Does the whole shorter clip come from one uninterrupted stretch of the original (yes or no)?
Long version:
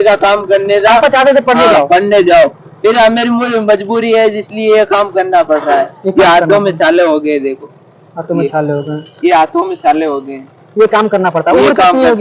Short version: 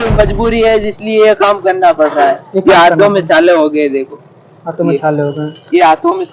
yes